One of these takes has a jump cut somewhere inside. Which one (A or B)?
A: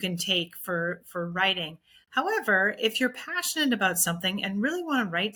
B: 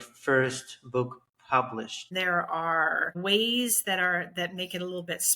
B